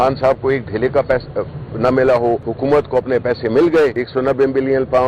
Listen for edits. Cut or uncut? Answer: cut